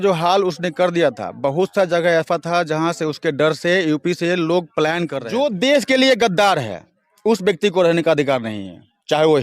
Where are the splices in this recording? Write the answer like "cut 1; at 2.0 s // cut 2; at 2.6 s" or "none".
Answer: cut 1; at 5.2 s